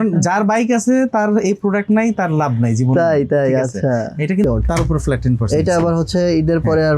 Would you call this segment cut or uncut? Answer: cut